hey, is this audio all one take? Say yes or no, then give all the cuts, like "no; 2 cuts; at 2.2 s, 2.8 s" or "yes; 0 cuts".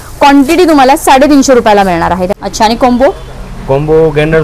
no; 1 cut; at 2.3 s